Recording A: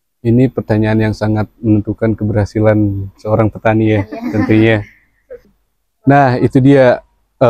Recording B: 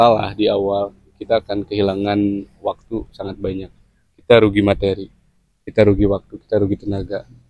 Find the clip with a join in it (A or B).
A